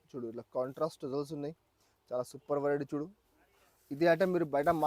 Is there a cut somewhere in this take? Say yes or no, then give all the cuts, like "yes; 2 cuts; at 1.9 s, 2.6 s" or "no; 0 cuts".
no; 0 cuts